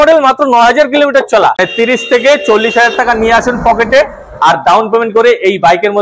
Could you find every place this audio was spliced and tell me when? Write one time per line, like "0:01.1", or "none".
0:01.7